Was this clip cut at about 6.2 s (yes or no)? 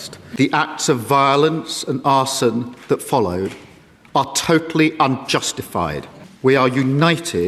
no